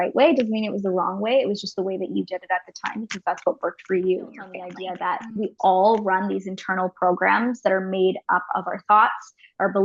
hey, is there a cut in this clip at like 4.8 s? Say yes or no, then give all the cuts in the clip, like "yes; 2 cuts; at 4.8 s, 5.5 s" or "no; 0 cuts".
yes; 1 cut; at 4.8 s